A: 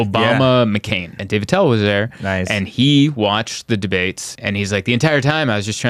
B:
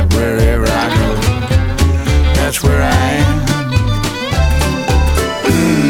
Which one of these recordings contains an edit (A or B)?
A